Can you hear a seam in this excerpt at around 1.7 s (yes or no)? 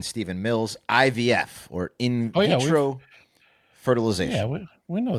no